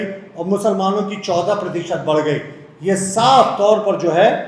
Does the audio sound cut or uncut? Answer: uncut